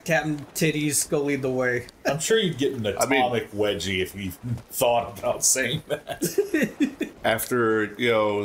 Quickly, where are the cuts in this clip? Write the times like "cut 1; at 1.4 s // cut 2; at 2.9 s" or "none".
cut 1; at 1.9 s // cut 2; at 7.1 s